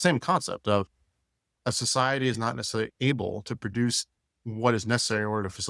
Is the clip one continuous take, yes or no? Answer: no